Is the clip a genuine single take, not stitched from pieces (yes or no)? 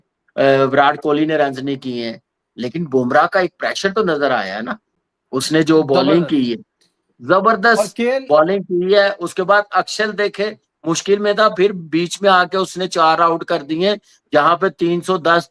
yes